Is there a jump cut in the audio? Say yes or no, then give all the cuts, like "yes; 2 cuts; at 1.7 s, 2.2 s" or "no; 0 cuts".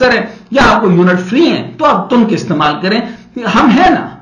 no; 0 cuts